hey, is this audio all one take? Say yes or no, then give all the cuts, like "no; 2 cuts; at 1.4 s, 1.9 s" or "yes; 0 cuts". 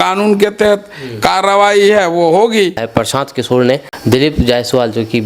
no; 2 cuts; at 2.8 s, 3.9 s